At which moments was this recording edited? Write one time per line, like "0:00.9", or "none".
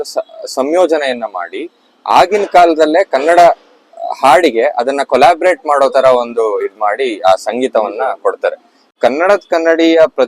0:09.0